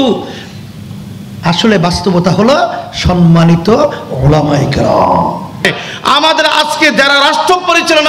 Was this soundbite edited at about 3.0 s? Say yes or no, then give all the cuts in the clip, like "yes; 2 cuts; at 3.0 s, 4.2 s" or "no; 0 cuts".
no; 1 cut; at 5.6 s